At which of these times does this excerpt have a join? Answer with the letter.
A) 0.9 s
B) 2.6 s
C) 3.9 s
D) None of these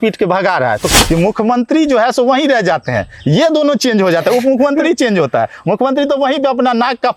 A